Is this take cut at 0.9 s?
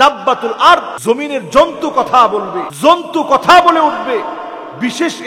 yes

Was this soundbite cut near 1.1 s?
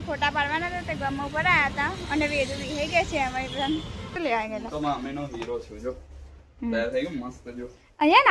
no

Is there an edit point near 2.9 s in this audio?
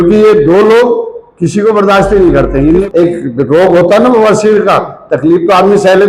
yes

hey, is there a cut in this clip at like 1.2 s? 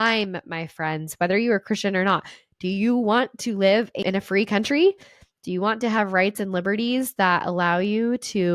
no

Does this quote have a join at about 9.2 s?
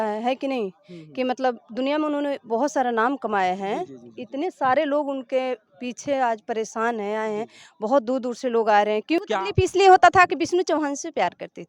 yes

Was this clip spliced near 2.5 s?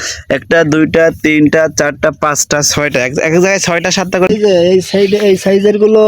no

